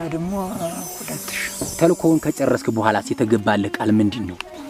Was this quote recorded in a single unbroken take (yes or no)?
no